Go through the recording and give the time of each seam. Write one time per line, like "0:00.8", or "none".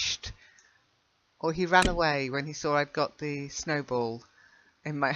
0:03.9